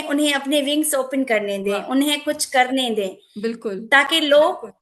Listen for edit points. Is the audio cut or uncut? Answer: uncut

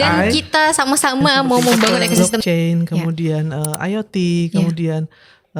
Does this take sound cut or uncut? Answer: cut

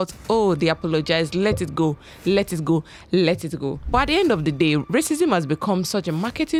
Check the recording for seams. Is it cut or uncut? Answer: uncut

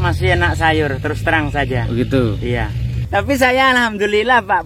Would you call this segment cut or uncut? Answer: cut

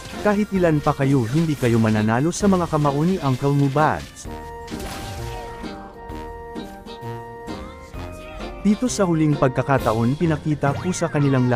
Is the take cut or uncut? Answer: uncut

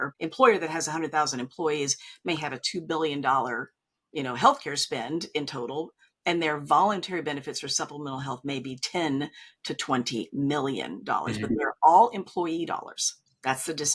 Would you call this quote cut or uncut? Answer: uncut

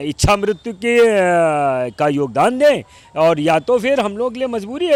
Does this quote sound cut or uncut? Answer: uncut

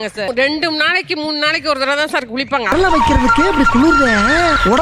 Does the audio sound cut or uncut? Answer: cut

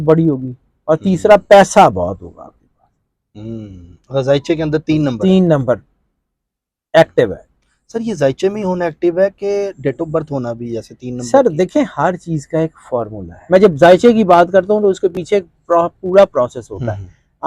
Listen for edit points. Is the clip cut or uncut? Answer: cut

